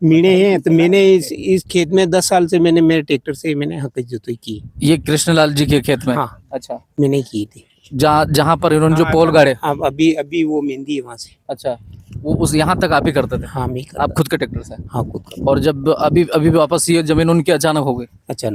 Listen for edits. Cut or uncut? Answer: uncut